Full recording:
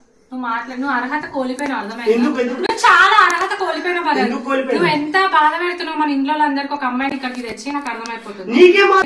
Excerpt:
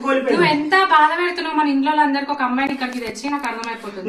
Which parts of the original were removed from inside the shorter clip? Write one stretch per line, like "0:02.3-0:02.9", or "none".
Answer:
none

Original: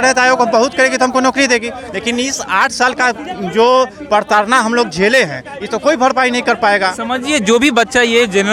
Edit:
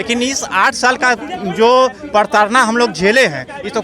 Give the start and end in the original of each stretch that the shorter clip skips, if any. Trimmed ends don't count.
none

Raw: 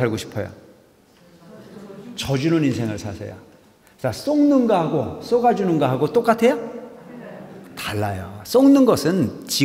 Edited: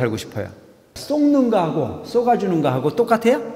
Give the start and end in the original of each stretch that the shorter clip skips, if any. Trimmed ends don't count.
0:01.0-0:04.2

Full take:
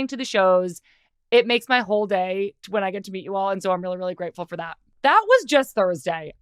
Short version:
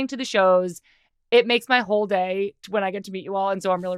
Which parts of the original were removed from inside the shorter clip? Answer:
none

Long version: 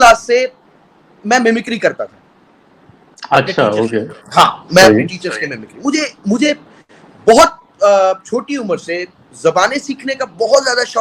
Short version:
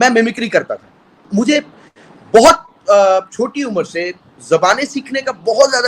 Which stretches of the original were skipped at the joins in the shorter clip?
0:02.5-0:06.1

